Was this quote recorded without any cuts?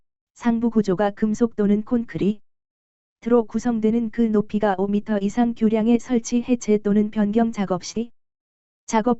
yes; 0 cuts

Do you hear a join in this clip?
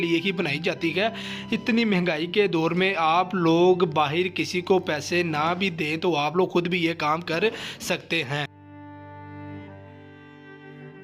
no; 0 cuts

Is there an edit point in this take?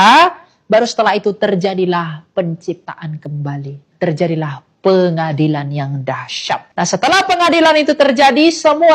yes; 2 cuts; at 3.9 s, 6.7 s

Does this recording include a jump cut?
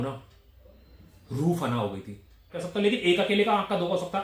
yes; 1 cut; at 2.5 s

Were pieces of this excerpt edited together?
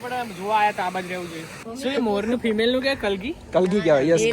yes; 1 cut; at 1.7 s

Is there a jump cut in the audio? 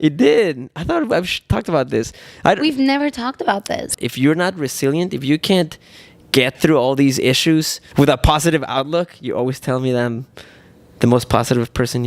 yes; 2 cuts; at 3.9 s, 7.8 s

